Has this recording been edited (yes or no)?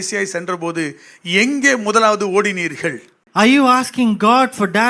yes